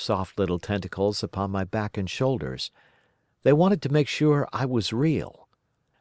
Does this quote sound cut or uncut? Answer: uncut